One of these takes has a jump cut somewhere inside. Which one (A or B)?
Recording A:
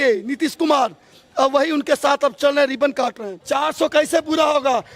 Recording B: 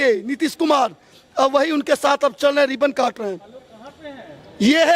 A